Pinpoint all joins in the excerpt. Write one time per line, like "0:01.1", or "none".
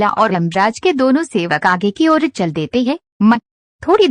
none